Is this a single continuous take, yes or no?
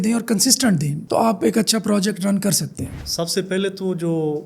no